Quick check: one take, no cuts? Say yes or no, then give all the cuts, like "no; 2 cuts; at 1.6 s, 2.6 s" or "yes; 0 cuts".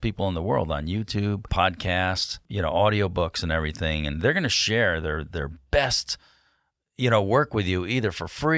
no; 2 cuts; at 1.5 s, 2.3 s